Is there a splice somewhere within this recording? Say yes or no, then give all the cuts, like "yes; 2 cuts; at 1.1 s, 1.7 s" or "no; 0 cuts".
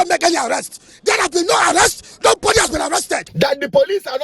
yes; 1 cut; at 3.3 s